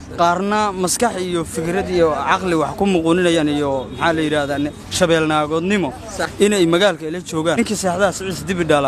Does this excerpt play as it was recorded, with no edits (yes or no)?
no